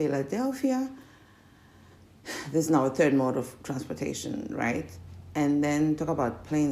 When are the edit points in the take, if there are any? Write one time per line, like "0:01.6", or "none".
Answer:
none